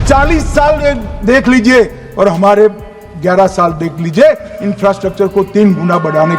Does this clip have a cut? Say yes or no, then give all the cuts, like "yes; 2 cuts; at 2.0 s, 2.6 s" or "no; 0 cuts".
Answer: no; 0 cuts